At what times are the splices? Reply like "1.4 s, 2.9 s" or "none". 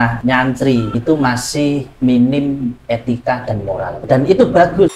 0.7 s, 4.0 s